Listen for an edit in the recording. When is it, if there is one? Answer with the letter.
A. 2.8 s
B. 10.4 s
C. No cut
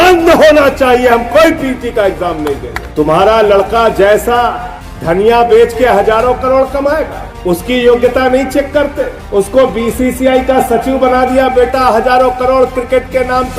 A